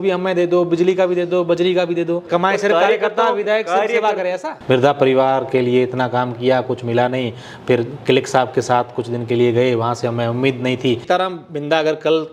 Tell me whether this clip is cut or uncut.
cut